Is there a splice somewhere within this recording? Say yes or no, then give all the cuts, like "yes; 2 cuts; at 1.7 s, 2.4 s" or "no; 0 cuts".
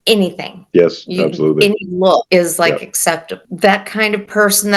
yes; 1 cut; at 3.4 s